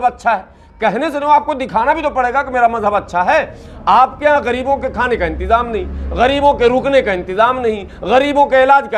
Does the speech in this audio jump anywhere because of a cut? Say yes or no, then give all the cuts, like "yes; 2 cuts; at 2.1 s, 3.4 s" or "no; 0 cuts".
no; 0 cuts